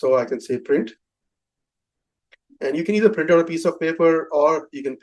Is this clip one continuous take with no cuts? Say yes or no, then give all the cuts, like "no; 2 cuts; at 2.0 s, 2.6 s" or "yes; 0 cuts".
yes; 0 cuts